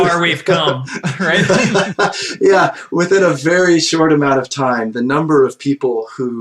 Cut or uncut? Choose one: uncut